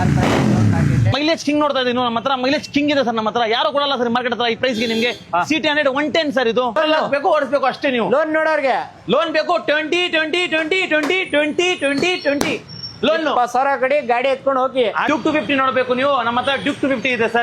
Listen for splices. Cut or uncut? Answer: cut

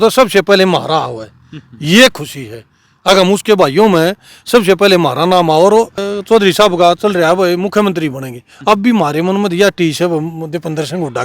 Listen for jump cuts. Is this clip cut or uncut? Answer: cut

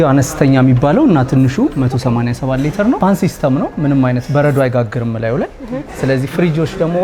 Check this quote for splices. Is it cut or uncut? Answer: uncut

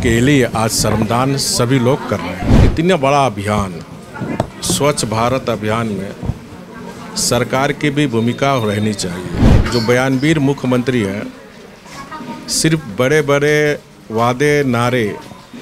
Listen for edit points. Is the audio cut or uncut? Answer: cut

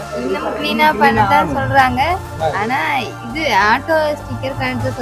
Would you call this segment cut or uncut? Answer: uncut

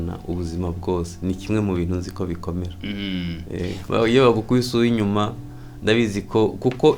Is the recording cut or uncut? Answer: cut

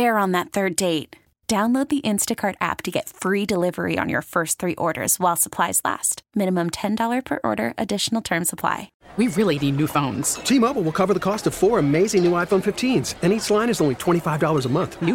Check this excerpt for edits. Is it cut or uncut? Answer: cut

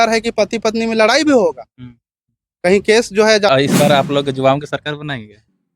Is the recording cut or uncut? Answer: cut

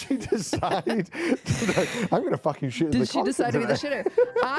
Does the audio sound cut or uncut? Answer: uncut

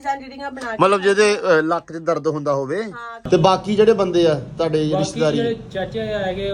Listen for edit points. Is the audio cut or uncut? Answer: cut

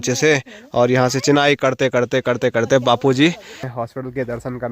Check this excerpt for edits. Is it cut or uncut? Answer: cut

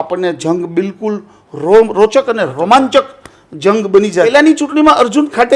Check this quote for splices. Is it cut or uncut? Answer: cut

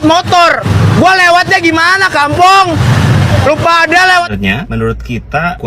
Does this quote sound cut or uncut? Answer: cut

